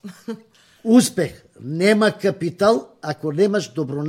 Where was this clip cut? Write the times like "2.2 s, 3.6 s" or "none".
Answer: none